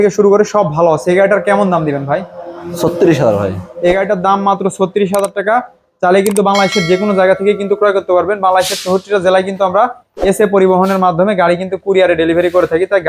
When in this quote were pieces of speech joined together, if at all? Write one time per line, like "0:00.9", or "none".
none